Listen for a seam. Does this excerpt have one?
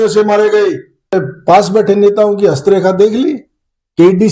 yes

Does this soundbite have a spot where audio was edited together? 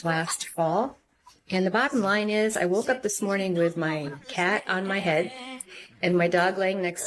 no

